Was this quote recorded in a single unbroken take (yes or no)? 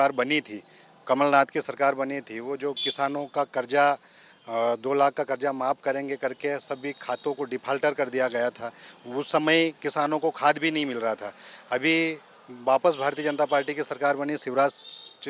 yes